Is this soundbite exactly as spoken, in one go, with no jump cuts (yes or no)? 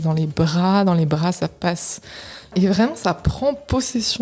no